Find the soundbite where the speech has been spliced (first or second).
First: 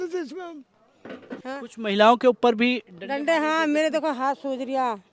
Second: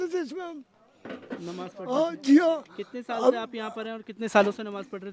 first